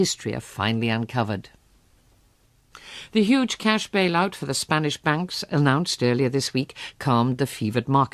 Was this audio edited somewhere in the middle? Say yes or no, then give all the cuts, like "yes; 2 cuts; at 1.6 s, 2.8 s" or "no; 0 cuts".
no; 0 cuts